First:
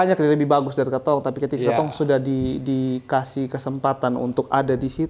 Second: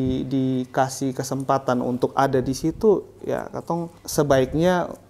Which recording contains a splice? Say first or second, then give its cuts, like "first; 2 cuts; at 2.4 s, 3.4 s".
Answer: second; 1 cut; at 4.0 s